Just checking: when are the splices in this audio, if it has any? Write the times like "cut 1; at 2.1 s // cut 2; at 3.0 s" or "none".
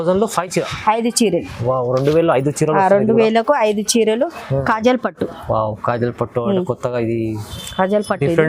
cut 1; at 4.6 s